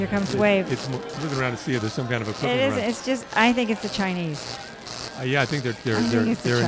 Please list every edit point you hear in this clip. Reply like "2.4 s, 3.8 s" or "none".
1.1 s